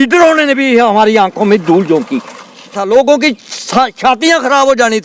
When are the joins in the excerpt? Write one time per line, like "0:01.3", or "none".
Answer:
0:02.8